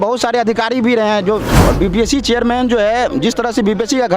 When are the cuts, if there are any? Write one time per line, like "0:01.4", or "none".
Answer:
0:01.5